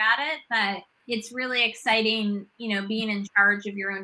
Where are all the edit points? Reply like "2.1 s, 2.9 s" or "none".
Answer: 0.9 s